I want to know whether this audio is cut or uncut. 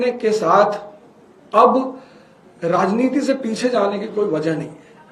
uncut